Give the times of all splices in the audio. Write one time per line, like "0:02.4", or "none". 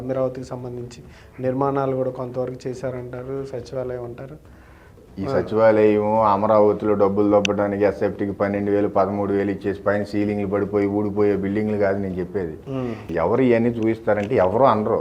0:04.9
0:13.0